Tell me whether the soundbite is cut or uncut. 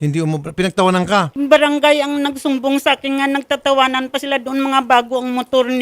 cut